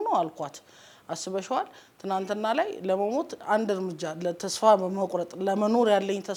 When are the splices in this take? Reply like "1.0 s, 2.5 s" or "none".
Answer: none